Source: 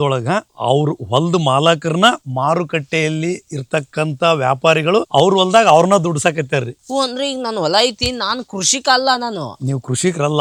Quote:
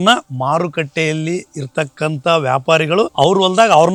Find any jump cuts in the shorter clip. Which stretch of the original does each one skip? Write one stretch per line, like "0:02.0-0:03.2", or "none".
none